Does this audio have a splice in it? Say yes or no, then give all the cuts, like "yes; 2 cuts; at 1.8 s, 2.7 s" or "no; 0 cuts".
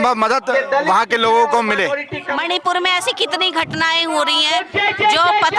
yes; 1 cut; at 2.3 s